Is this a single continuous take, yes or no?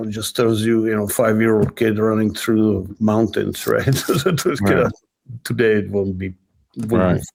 yes